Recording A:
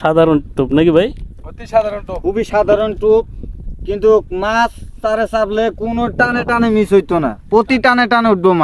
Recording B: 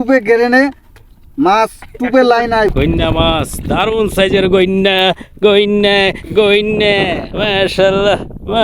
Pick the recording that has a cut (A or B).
B